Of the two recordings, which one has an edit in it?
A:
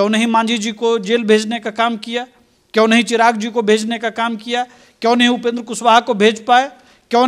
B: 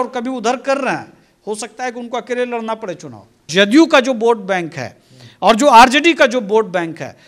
B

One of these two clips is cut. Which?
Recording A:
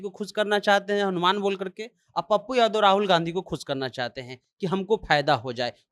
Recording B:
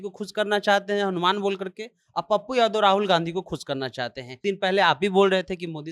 B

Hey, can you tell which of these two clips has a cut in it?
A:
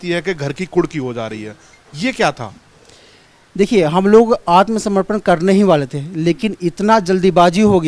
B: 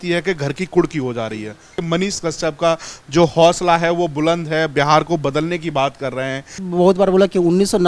B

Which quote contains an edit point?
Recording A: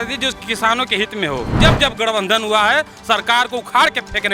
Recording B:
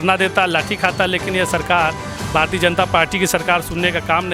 A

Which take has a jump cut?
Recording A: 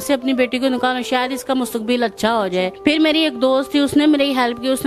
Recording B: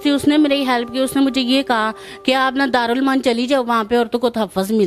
A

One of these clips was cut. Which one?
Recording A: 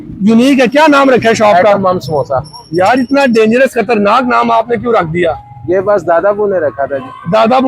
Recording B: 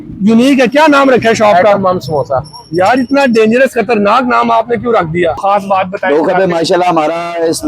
B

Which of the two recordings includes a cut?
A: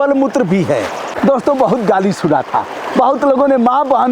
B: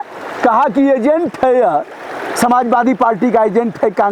A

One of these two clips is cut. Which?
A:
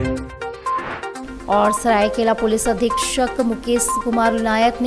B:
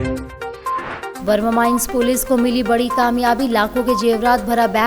B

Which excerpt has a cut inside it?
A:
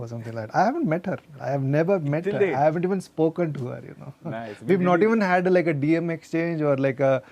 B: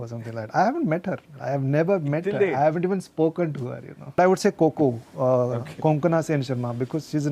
B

